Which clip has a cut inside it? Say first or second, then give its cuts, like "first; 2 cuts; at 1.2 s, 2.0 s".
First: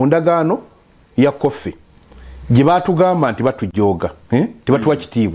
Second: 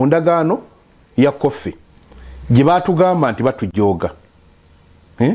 first; 1 cut; at 4.2 s